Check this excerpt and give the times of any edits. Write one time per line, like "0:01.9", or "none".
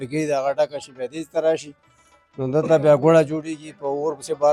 none

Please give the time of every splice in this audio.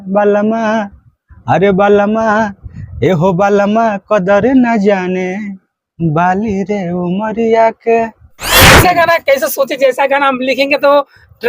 0:08.8

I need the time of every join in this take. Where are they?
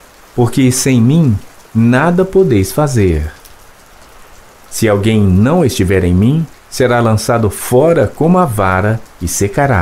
0:03.3
0:04.8

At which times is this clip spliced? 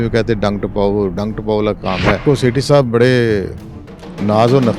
0:02.2

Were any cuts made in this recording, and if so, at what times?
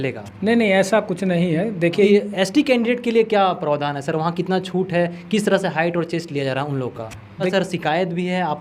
0:02.1
0:07.5

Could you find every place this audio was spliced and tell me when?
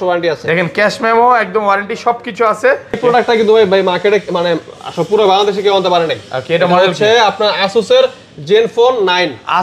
0:03.0

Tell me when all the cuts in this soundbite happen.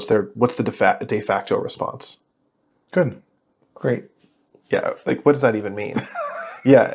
none

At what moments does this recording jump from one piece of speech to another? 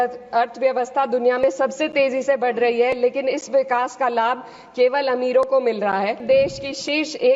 0:06.2

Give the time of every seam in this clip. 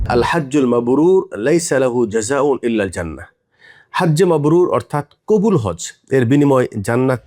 none

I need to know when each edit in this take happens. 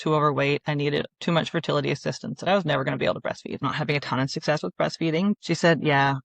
0:03.6
0:05.4

